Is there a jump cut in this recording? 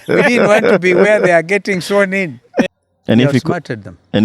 yes; 1 cut; at 2.7 s

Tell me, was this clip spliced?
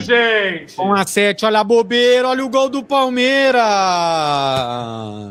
no; 0 cuts

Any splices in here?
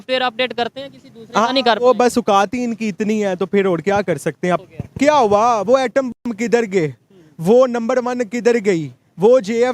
yes; 1 cut; at 4.6 s

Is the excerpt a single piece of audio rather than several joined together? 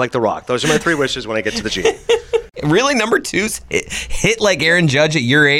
no; 1 cut; at 2.5 s

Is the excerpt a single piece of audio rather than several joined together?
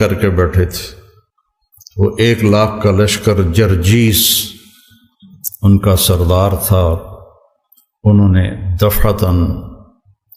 yes; 0 cuts

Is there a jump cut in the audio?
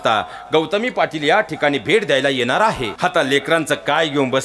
yes; 1 cut; at 2.9 s

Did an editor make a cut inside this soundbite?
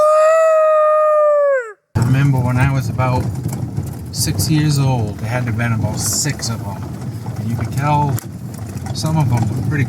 yes; 2 cuts; at 1.9 s, 5.2 s

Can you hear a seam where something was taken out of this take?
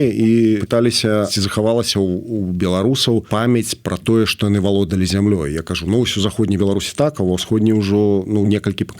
yes; 2 cuts; at 1.1 s, 3.3 s

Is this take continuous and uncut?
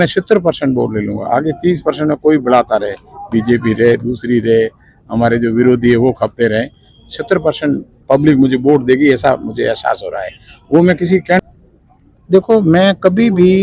no; 1 cut; at 11.4 s

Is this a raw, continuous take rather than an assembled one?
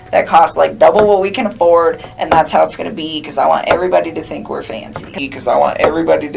no; 1 cut; at 5.1 s

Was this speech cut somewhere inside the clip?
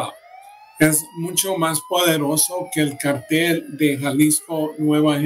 no; 0 cuts

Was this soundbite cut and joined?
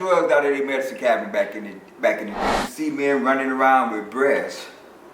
yes; 1 cut; at 2.6 s

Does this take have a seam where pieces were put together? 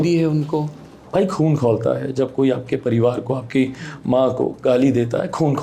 yes; 1 cut; at 1.0 s

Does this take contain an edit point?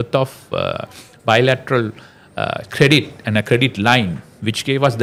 no; 0 cuts

